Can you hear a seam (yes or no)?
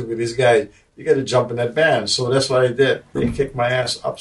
yes